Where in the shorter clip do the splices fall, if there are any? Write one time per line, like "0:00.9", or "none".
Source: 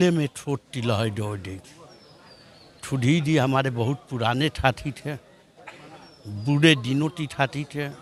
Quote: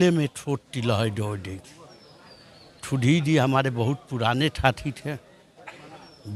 none